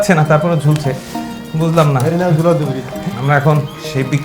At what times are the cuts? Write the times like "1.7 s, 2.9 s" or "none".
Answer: 3.0 s